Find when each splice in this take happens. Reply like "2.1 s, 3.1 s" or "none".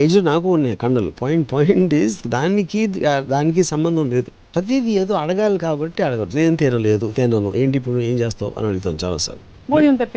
4.5 s